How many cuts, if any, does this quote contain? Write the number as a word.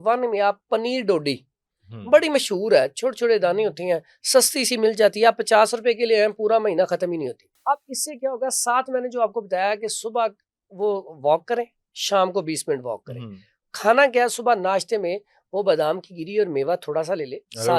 one